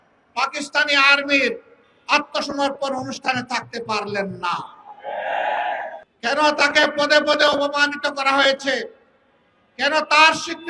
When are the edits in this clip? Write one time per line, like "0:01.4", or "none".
0:06.0